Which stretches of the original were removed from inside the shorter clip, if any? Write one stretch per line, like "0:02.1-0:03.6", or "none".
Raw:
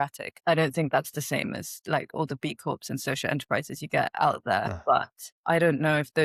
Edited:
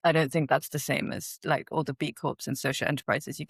none